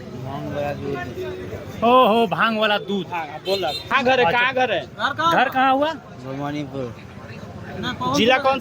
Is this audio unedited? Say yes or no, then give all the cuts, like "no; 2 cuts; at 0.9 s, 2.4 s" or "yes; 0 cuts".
no; 1 cut; at 3.9 s